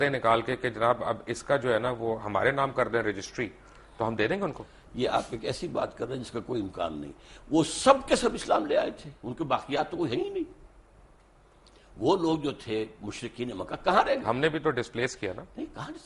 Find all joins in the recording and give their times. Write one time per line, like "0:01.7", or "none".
none